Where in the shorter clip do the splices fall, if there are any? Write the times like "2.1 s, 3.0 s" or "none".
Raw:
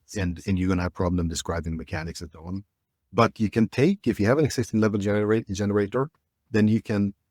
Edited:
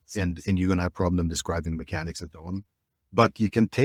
none